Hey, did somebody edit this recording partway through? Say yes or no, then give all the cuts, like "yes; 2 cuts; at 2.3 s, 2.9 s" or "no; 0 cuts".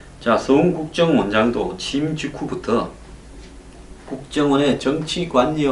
yes; 1 cut; at 2.6 s